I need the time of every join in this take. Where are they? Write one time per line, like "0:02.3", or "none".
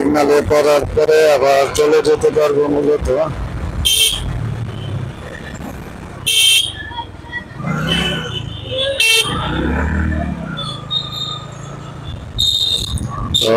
none